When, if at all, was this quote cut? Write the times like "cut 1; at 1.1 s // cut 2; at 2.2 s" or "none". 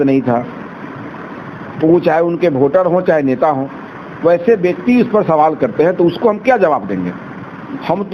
none